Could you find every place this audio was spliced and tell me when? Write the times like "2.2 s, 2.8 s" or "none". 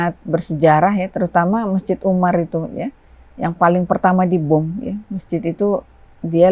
none